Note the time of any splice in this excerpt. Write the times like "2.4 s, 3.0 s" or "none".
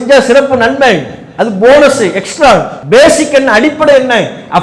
2.7 s